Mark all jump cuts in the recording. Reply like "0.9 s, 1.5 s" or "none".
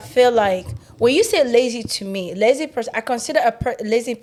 none